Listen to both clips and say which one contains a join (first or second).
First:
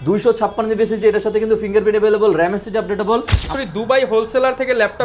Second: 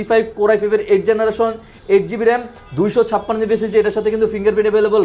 first